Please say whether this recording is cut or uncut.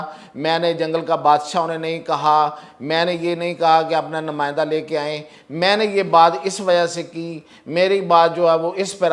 uncut